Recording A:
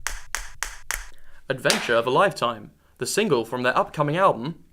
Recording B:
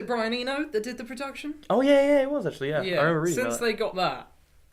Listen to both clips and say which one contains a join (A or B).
A